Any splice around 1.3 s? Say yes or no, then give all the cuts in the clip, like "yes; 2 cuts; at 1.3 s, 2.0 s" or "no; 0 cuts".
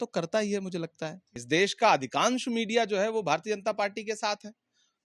yes; 1 cut; at 1.3 s